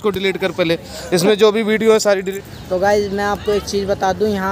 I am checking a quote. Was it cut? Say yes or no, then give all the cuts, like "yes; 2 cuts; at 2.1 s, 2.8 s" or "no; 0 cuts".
yes; 1 cut; at 2.3 s